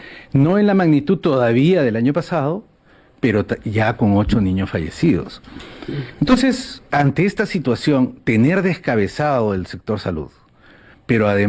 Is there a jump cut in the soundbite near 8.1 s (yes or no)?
no